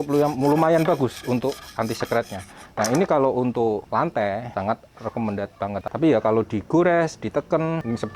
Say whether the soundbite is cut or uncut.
cut